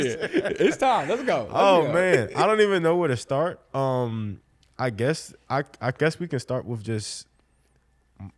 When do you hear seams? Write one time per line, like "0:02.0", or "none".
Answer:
none